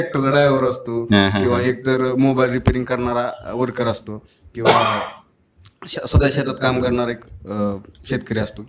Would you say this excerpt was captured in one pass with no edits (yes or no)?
yes